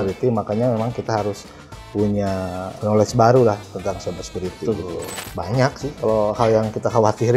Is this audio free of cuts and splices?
no; 1 cut; at 5.1 s

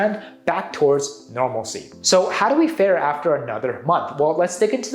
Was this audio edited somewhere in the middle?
yes; 1 cut; at 1.9 s

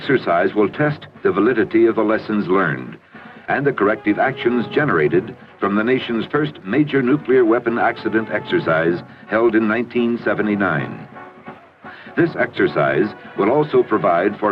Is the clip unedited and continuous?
no; 1 cut; at 8.4 s

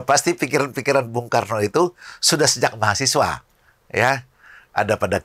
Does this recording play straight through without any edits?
yes; 0 cuts

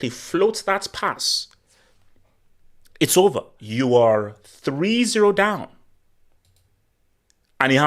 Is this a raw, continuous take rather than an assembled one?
no; 1 cut; at 3.6 s

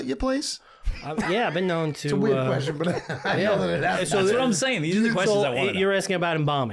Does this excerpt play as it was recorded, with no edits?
yes; 0 cuts

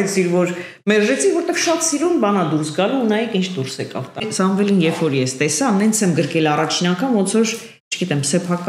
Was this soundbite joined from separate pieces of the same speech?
yes; 1 cut; at 4.3 s

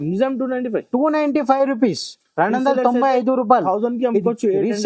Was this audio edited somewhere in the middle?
no; 0 cuts

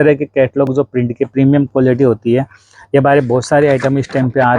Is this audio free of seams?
yes; 0 cuts

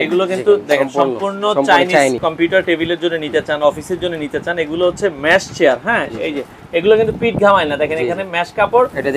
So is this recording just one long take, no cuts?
no; 1 cut; at 2.2 s

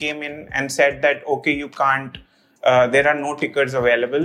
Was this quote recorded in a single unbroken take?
yes; 0 cuts

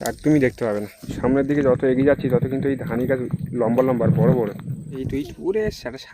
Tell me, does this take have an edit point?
yes; 2 cuts; at 1.0 s, 5.0 s

